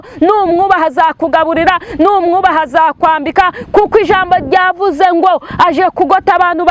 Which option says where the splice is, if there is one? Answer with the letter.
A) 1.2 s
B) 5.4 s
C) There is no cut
C